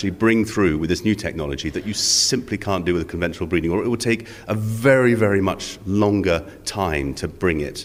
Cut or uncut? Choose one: uncut